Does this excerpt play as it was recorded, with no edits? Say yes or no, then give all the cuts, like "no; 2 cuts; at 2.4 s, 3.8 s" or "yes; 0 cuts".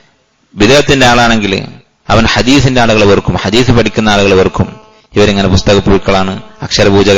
yes; 0 cuts